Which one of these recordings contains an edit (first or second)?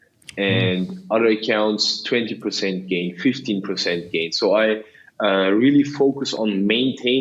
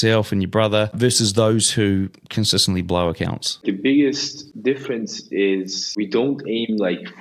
second